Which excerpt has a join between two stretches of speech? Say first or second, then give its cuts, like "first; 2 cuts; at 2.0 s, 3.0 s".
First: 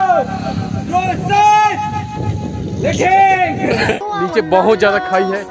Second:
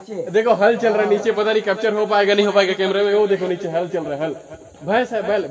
first; 1 cut; at 4.1 s